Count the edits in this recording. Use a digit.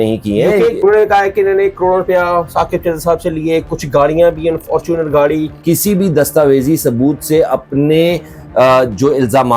2